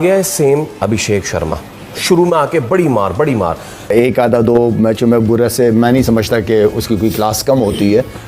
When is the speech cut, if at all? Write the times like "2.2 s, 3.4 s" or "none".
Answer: 3.9 s